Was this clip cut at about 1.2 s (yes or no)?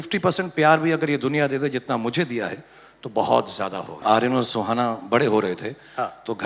no